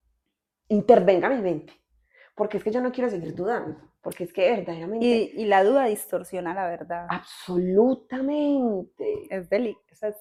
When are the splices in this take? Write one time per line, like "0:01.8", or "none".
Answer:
none